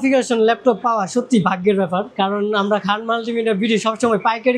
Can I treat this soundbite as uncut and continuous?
yes; 0 cuts

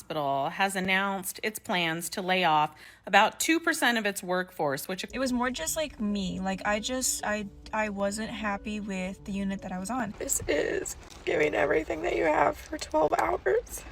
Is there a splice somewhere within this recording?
yes; 2 cuts; at 5.0 s, 10.1 s

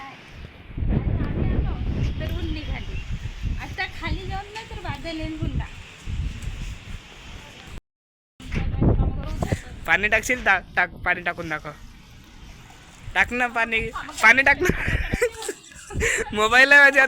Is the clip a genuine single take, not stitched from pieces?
no; 2 cuts; at 7.8 s, 9.7 s

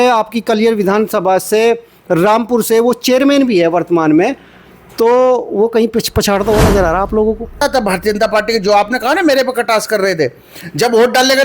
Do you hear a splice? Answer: yes; 1 cut; at 7.6 s

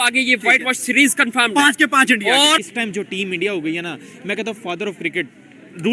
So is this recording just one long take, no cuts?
no; 1 cut; at 2.6 s

